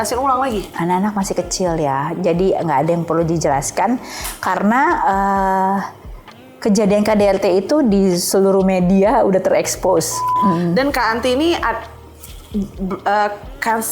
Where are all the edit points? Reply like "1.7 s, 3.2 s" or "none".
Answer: 10.3 s